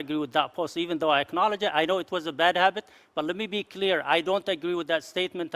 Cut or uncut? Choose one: uncut